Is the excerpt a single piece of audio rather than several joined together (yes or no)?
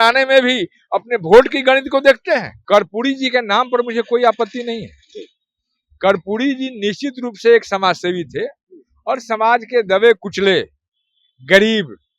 no